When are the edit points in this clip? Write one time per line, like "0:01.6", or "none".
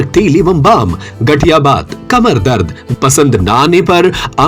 0:02.9